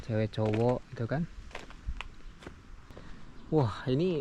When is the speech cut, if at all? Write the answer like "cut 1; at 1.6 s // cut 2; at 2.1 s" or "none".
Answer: cut 1; at 2.8 s

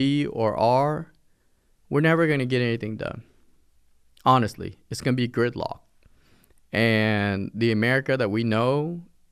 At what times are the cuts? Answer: none

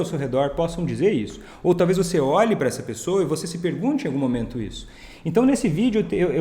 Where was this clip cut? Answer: none

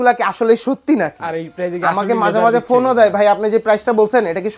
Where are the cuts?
none

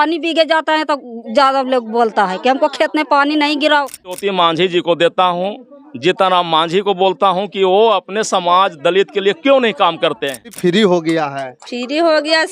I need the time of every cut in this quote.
cut 1; at 4.2 s // cut 2; at 10.6 s

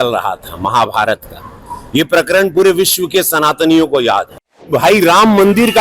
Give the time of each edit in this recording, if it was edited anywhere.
cut 1; at 4.7 s

